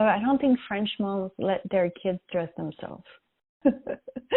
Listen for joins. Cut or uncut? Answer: cut